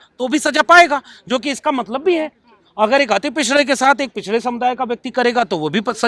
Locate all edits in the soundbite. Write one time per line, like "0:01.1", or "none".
none